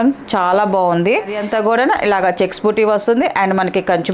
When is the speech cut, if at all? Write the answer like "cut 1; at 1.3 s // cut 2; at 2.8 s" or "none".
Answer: cut 1; at 1.4 s